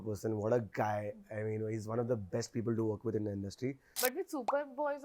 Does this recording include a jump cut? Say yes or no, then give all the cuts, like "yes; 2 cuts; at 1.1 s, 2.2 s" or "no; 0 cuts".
yes; 1 cut; at 3.9 s